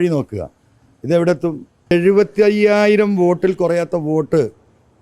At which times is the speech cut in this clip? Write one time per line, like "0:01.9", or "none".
0:01.9